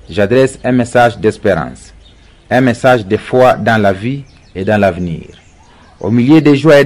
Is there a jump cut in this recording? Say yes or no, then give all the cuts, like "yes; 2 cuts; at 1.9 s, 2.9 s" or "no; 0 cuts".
no; 0 cuts